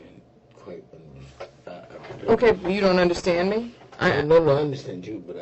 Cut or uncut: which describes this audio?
uncut